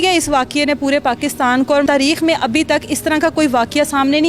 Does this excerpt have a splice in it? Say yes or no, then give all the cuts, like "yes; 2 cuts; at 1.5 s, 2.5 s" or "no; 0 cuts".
yes; 1 cut; at 1.9 s